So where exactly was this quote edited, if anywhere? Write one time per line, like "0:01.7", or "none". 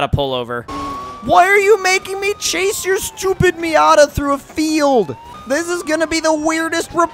0:01.0
0:05.3